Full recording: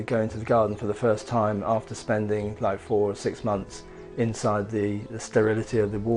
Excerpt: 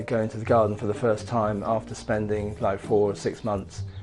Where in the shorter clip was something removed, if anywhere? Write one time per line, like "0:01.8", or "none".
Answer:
none

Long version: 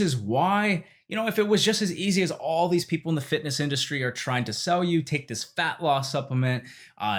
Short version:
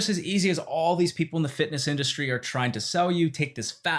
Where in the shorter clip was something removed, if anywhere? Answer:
none

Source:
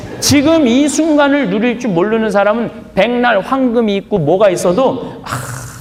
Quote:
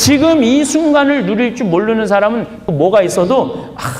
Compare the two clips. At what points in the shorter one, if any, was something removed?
0:02.6

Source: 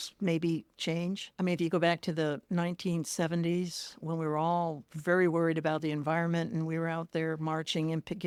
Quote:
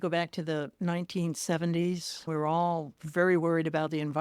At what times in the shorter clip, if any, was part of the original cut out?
0:02.2

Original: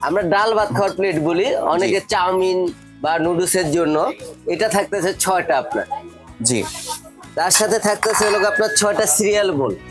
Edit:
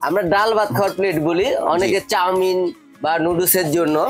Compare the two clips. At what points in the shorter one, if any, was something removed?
none

